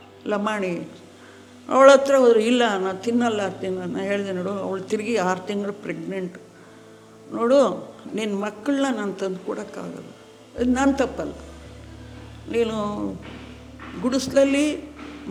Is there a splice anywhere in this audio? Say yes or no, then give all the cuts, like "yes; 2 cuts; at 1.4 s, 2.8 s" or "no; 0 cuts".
no; 0 cuts